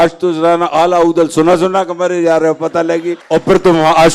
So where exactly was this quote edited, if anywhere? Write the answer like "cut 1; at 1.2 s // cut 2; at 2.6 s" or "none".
cut 1; at 3.2 s

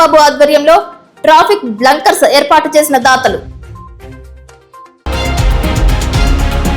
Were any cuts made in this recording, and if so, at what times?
cut 1; at 5.0 s

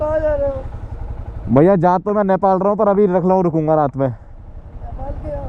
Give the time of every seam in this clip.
none

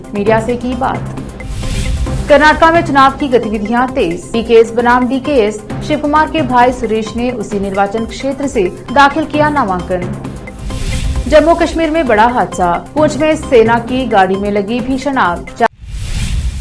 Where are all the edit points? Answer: cut 1; at 15.7 s

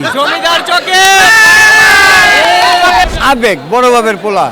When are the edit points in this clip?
cut 1; at 3.1 s

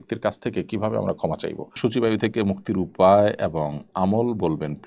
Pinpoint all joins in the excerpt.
cut 1; at 1.7 s

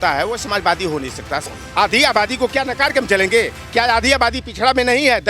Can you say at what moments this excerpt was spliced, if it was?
cut 1; at 1.5 s

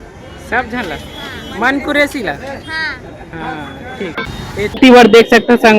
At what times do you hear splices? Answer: none

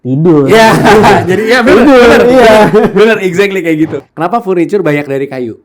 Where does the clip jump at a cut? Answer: cut 1; at 4.0 s

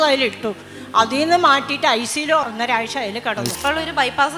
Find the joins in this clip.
cut 1; at 2.5 s // cut 2; at 3.6 s

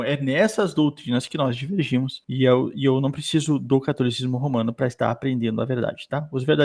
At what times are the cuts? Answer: none

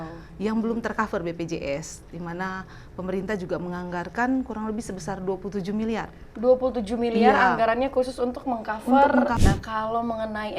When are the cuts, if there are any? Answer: cut 1; at 9.4 s

